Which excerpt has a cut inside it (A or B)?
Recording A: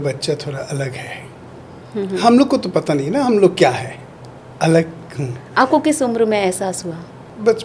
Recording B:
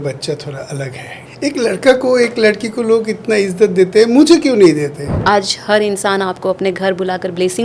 B